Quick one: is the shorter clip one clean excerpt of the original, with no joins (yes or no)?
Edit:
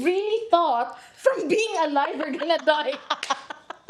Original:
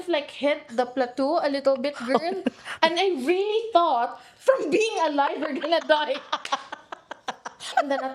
yes